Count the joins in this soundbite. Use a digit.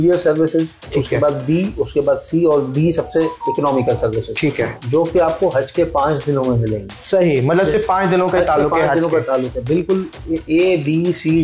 1